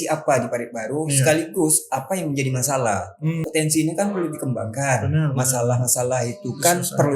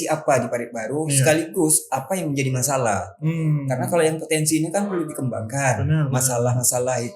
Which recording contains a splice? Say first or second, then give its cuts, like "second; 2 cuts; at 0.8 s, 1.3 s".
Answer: first; 1 cut; at 3.4 s